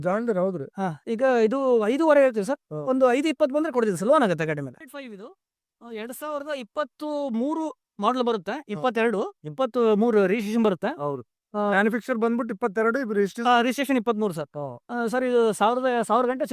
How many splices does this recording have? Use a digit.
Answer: 1